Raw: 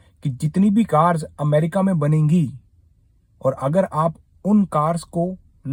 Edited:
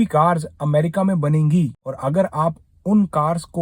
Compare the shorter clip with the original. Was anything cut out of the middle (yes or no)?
yes